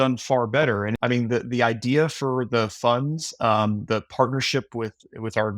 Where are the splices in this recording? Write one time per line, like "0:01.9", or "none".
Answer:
0:00.9